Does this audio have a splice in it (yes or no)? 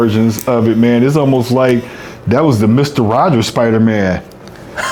no